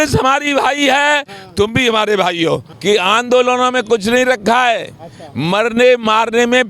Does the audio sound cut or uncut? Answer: cut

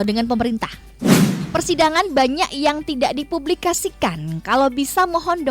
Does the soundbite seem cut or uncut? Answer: cut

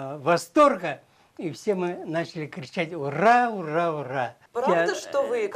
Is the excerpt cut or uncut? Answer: cut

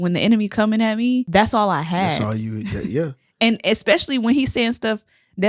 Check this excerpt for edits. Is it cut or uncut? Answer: cut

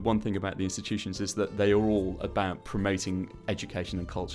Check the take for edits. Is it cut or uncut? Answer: uncut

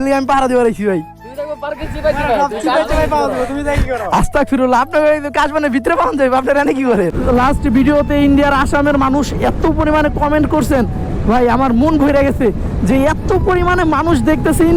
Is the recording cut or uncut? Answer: cut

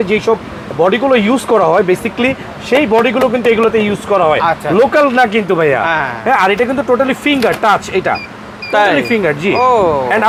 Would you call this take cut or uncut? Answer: uncut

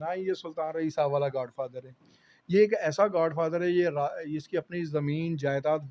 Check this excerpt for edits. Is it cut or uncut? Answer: uncut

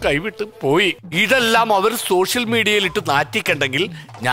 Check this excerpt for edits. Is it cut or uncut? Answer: cut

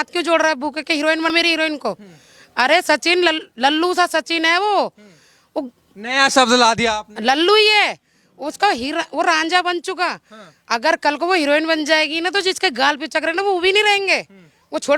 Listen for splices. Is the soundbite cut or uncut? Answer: cut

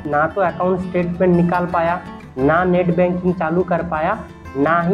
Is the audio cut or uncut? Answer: uncut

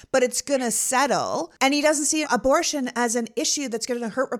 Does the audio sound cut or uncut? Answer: cut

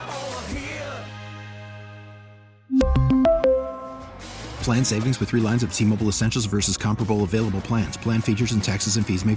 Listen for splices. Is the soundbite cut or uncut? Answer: uncut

